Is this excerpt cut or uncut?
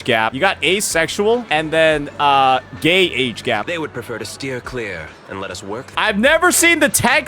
cut